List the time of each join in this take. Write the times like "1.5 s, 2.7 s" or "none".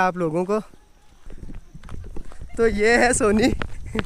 1.3 s